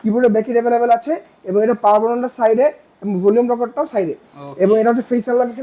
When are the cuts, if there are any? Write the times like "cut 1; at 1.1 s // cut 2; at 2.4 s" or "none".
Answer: none